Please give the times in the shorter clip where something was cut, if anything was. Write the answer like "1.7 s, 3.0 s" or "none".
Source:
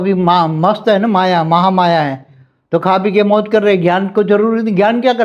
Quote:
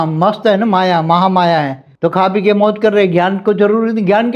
1.8 s